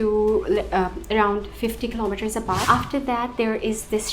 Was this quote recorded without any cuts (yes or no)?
no